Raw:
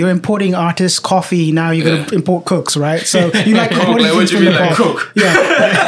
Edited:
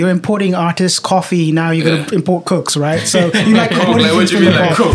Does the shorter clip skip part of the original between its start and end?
no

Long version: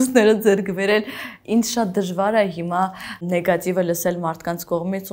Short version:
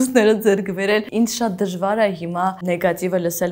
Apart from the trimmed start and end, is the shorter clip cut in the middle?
yes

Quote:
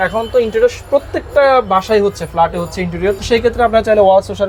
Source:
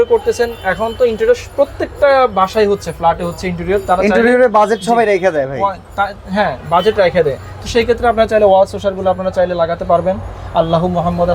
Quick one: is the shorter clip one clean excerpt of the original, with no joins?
no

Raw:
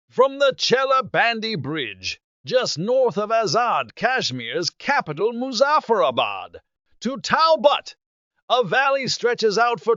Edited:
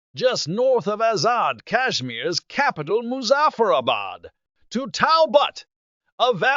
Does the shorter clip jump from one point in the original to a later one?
no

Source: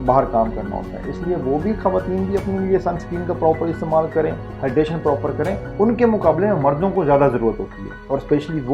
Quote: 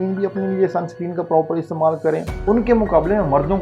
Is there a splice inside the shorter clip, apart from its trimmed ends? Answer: yes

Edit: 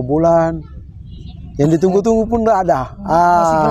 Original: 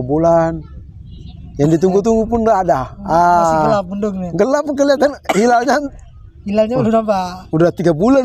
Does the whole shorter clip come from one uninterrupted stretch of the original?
yes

